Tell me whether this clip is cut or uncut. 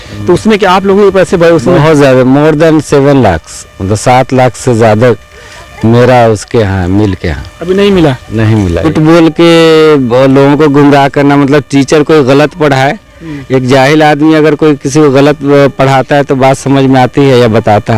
cut